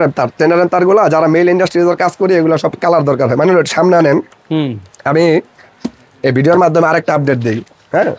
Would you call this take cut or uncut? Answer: uncut